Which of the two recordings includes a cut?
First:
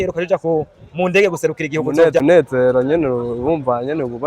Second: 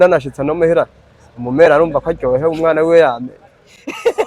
first; 1 cut; at 2.2 s

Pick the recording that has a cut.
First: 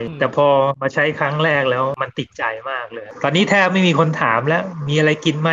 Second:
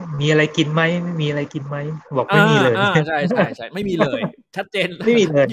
first; 1 cut; at 3.0 s

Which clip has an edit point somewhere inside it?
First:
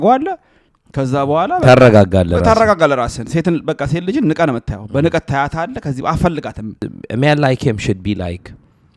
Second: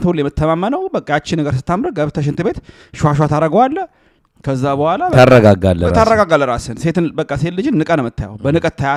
first; 1 cut; at 6.9 s

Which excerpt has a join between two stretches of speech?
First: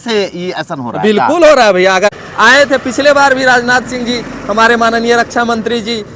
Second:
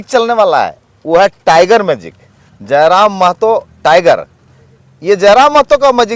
first; 1 cut; at 2.1 s

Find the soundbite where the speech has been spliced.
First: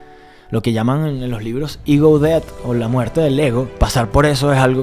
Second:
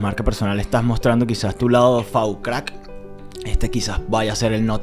first; 1 cut; at 3.7 s

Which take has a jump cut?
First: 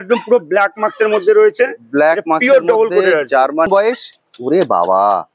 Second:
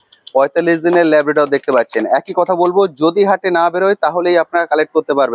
first; 1 cut; at 3.7 s

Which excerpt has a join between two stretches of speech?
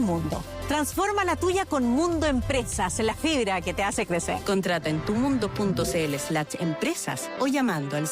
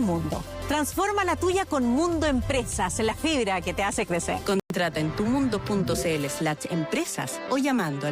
first; 1 cut; at 4.6 s

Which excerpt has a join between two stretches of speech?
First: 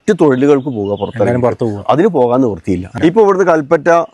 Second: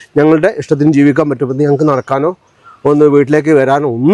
first; 1 cut; at 2.9 s

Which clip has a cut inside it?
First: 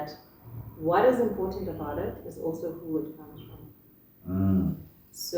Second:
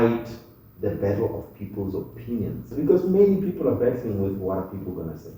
second; 1 cut; at 2.7 s

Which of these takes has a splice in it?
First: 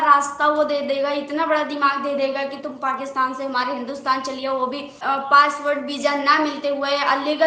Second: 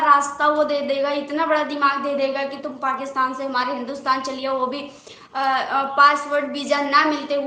first; 1 cut; at 5.0 s

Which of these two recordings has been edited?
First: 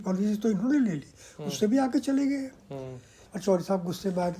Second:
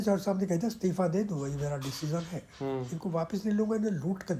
first; 1 cut; at 3.1 s

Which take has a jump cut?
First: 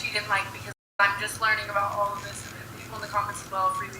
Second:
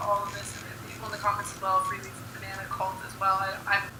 first; 1 cut; at 1.0 s

